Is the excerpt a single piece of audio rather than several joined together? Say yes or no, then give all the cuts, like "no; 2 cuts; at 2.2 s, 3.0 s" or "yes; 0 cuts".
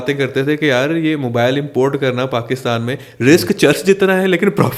yes; 0 cuts